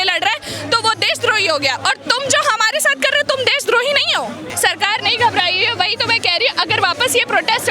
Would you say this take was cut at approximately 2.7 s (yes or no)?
no